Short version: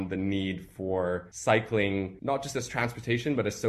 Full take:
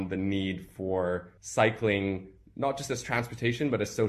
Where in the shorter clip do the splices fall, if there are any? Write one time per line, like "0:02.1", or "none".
0:01.3
0:02.1